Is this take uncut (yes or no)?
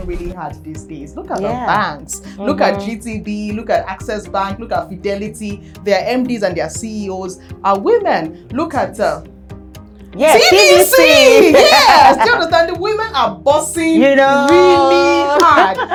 yes